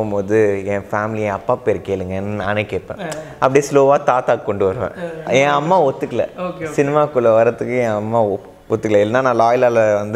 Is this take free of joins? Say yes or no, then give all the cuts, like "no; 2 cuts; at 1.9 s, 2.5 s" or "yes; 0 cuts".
no; 1 cut; at 5.1 s